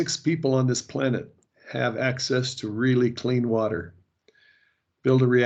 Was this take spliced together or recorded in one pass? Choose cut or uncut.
uncut